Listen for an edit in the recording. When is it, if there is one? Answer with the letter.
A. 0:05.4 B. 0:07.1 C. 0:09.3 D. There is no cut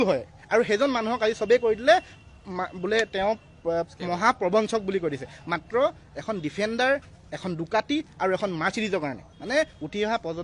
C